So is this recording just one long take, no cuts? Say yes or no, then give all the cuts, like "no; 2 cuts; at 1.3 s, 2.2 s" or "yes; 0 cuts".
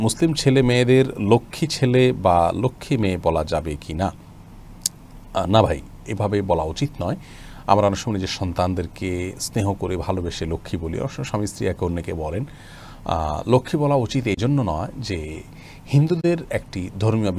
yes; 0 cuts